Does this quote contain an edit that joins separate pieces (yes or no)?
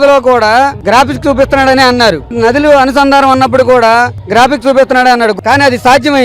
yes